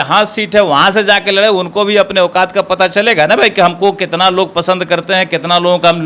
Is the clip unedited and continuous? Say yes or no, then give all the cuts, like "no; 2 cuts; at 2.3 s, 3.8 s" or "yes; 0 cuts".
yes; 0 cuts